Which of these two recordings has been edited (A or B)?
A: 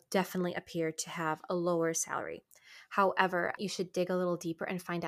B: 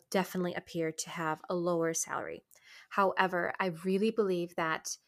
A